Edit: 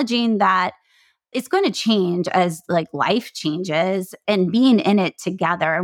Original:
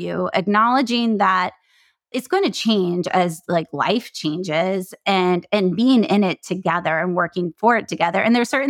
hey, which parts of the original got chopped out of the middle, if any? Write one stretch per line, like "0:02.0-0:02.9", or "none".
0:05.0-0:05.4